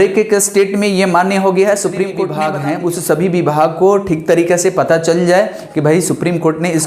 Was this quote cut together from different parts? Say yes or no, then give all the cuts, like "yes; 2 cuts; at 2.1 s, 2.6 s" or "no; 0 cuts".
yes; 1 cut; at 2.4 s